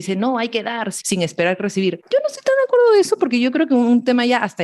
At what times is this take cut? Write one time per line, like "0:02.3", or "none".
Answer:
0:00.9
0:02.0